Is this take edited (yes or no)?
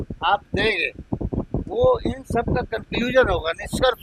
no